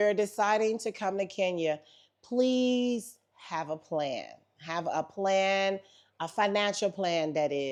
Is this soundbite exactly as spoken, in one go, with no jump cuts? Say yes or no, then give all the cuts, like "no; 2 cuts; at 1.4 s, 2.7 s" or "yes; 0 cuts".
yes; 0 cuts